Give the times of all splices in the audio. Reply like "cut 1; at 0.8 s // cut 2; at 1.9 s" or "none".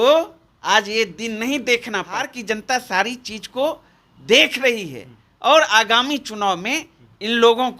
cut 1; at 2.3 s